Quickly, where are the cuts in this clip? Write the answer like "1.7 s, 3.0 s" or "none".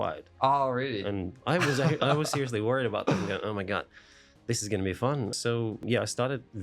5.4 s